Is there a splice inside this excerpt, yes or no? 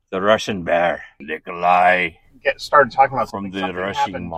yes